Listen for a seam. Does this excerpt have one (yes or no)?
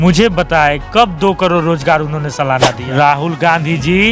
yes